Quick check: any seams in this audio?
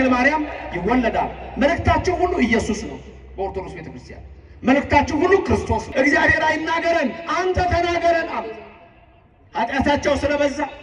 yes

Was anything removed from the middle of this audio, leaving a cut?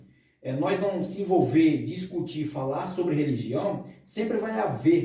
no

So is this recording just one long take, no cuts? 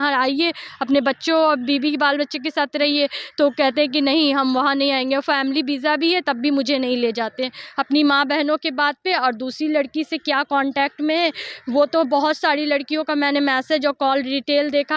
yes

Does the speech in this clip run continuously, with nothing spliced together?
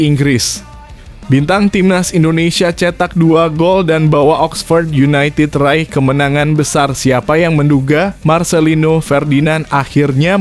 yes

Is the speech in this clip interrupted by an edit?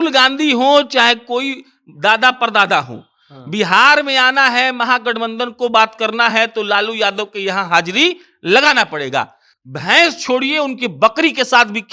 no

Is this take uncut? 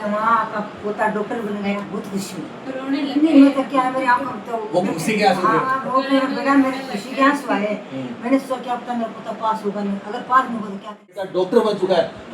no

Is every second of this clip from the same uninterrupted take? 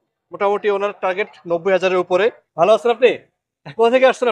no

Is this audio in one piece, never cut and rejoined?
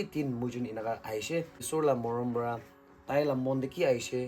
no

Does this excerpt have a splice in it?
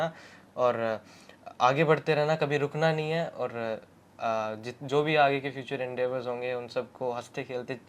no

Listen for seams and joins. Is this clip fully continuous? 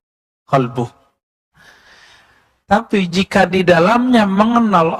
no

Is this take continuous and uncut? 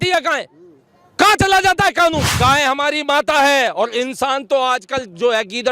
no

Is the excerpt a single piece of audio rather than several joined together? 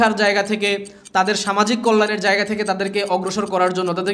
yes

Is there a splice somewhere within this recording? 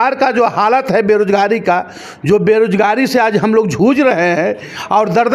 no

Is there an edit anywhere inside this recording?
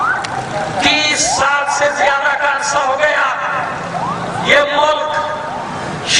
yes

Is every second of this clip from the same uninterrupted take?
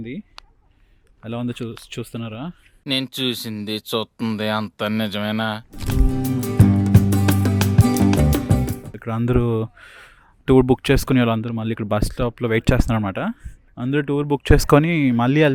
yes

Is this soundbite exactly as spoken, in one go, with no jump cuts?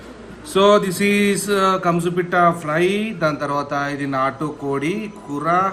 yes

